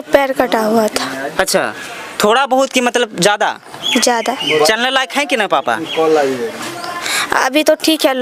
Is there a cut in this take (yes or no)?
no